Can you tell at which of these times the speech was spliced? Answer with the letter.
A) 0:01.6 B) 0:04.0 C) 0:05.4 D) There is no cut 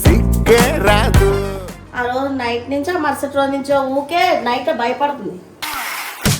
A